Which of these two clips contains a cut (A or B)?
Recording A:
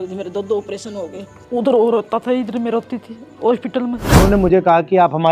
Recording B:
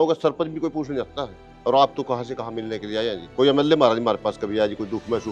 A